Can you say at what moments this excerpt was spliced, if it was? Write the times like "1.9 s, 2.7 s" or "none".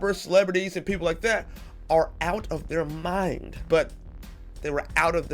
3.5 s

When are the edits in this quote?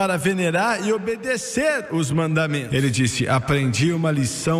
2.7 s

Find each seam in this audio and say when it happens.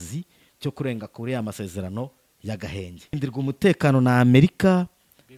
3.1 s

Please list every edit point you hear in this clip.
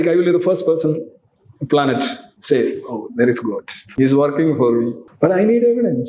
3.8 s, 5.0 s

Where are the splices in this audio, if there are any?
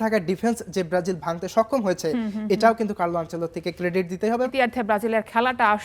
4.5 s

